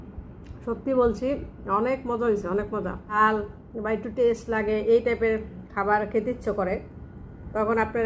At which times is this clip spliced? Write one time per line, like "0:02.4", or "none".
0:03.0